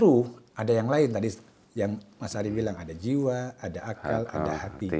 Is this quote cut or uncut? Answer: uncut